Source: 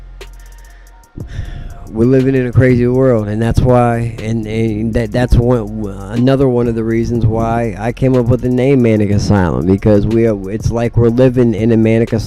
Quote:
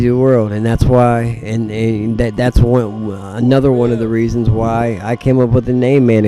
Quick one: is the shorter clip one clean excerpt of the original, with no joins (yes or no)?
yes